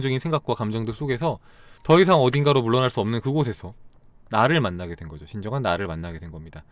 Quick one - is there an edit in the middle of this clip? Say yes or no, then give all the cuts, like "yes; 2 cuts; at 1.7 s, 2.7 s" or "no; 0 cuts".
no; 0 cuts